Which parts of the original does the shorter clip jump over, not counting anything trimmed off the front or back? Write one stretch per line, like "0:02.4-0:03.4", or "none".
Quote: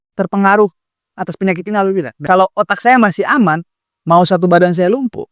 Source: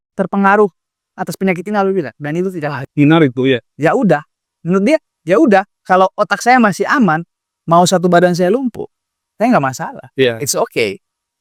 0:02.1-0:05.8